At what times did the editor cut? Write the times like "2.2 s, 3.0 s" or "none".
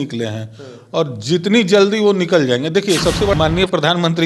3.3 s